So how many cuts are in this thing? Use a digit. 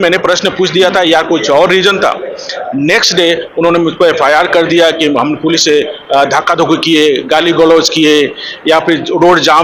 0